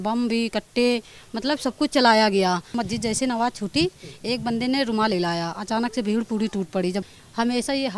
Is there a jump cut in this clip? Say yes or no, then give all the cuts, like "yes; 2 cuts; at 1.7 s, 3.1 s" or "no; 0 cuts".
yes; 2 cuts; at 2.7 s, 7.1 s